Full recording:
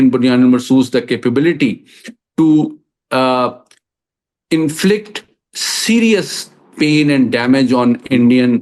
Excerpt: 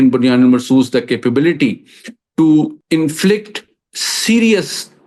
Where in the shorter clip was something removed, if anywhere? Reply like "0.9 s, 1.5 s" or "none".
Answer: 2.8 s